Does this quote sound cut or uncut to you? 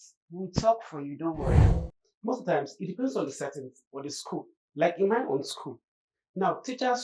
cut